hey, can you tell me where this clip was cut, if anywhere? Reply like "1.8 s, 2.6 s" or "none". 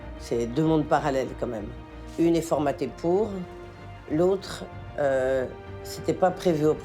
none